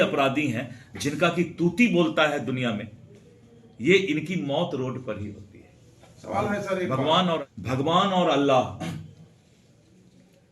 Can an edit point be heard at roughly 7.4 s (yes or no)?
yes